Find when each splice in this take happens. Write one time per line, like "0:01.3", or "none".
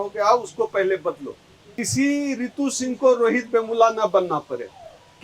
0:01.8